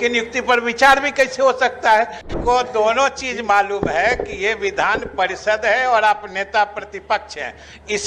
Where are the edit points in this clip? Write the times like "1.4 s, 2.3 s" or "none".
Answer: 2.3 s